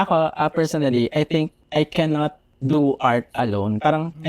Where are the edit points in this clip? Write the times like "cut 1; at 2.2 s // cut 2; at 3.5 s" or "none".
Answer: cut 1; at 1.6 s // cut 2; at 2.5 s